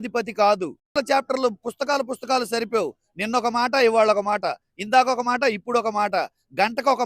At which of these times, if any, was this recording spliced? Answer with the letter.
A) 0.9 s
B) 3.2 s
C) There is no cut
A